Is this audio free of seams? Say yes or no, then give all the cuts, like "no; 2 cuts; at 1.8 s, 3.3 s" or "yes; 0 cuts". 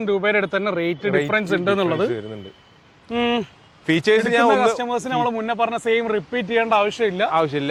yes; 0 cuts